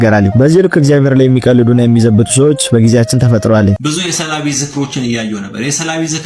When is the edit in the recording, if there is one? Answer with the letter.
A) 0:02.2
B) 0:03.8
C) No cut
B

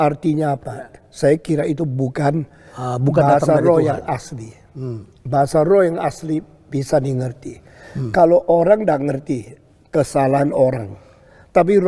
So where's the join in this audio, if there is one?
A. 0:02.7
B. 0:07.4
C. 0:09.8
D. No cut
B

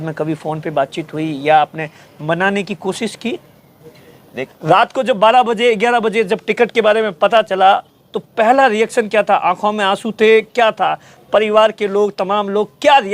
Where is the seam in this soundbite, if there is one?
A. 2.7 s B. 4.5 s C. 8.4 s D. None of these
B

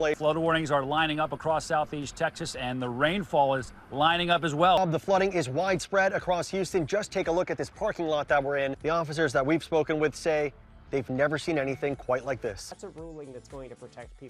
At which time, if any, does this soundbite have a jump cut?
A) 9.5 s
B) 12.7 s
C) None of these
B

